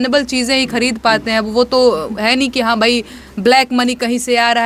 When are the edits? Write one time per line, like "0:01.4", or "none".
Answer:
none

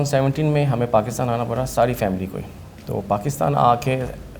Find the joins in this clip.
none

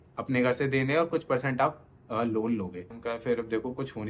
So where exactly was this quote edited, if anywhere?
0:03.0

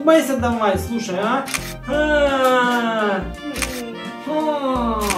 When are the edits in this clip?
none

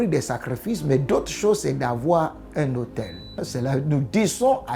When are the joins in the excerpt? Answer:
0:03.5

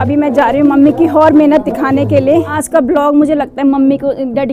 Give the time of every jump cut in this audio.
0:02.6

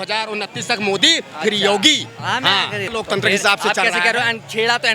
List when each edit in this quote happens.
0:02.9

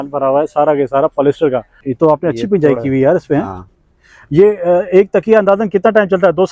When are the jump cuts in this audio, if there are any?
0:01.8

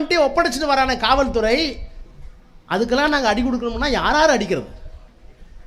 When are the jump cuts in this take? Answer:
none

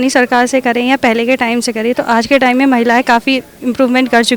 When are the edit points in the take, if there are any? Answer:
none

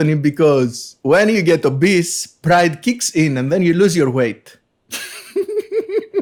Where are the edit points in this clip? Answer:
none

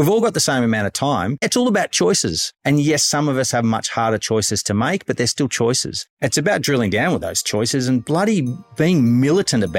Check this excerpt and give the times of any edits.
0:01.5
0:02.5
0:06.1

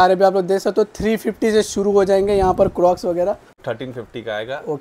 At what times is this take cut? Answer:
0:03.6

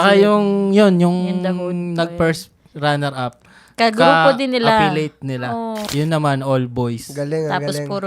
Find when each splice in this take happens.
0:05.8

